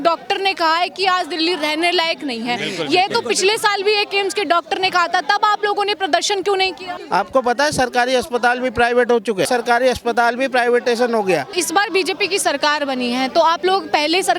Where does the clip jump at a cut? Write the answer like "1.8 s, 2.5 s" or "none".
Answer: 7.0 s, 9.5 s, 11.6 s